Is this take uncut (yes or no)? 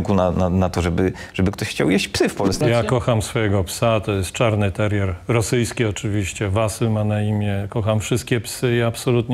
no